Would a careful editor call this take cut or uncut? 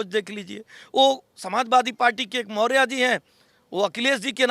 uncut